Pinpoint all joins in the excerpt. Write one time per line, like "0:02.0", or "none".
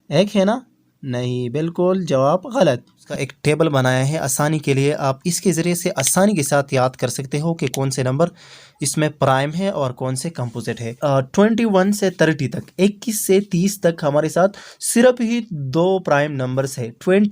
0:03.1
0:10.9